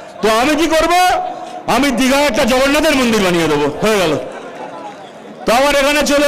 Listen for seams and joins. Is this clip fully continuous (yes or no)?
yes